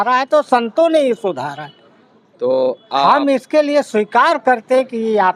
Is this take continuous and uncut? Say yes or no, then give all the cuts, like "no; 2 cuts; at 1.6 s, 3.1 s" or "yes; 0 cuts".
yes; 0 cuts